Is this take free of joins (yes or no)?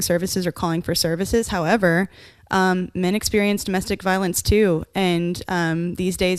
yes